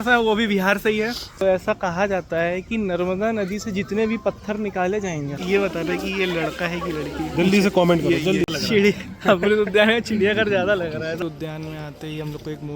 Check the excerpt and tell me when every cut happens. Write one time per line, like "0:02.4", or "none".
0:01.4
0:05.4
0:08.5
0:11.2